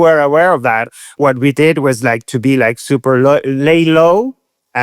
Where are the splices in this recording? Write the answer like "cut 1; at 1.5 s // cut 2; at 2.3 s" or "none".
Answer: cut 1; at 1.2 s